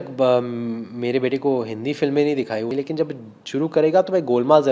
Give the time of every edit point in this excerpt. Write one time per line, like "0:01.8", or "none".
0:02.7